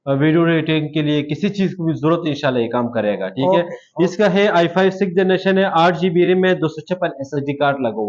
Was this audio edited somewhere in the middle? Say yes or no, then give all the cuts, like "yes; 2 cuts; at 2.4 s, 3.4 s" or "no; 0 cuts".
no; 0 cuts